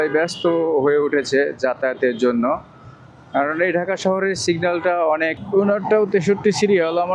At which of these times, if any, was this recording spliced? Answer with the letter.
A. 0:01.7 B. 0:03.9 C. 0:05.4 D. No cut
C